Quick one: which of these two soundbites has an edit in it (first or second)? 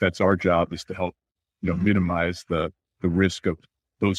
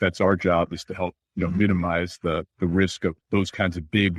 second